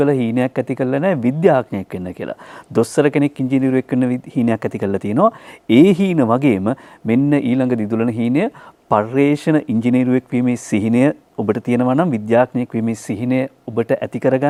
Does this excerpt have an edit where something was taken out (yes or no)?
no